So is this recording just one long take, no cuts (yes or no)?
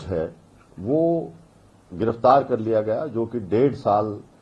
yes